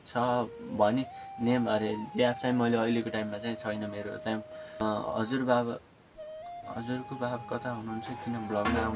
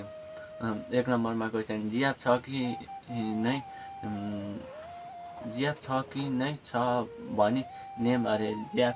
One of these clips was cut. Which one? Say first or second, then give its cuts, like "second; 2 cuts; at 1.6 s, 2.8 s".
first; 1 cut; at 4.8 s